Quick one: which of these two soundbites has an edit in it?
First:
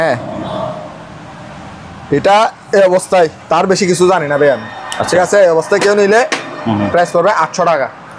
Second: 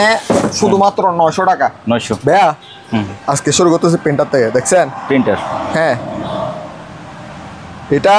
second; 1 cut; at 2.1 s

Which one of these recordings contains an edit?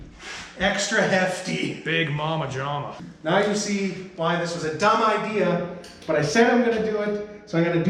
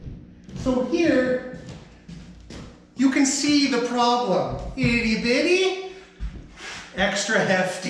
first; 1 cut; at 3.0 s

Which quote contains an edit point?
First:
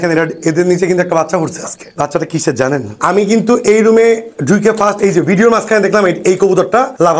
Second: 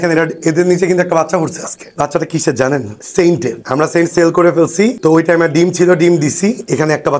first; 1 cut; at 3.0 s

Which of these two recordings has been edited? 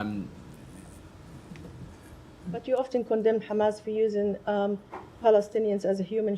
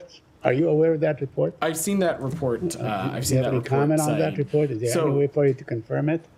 first; 1 cut; at 2.6 s

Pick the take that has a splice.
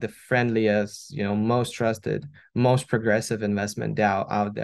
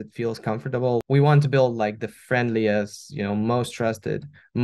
second; 1 cut; at 1.0 s

